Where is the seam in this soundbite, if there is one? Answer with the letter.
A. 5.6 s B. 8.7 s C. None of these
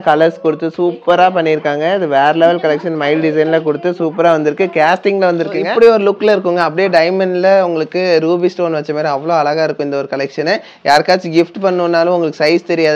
A